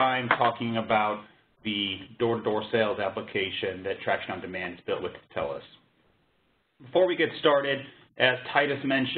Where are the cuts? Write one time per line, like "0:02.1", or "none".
0:01.3